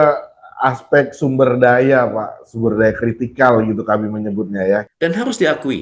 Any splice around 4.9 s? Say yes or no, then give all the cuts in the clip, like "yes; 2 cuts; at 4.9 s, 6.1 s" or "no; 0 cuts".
yes; 1 cut; at 4.9 s